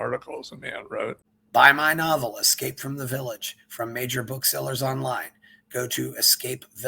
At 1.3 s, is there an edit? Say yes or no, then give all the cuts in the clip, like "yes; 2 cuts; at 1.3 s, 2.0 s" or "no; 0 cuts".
yes; 1 cut; at 1.3 s